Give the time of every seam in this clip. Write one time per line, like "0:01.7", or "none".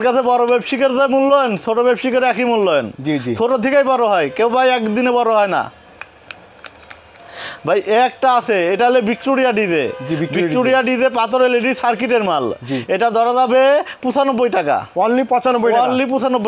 none